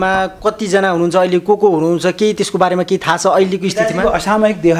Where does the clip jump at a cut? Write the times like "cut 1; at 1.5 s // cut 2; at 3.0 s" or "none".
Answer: none